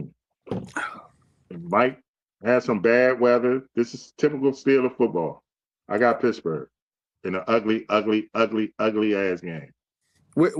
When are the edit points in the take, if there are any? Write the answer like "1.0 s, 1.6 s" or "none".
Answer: none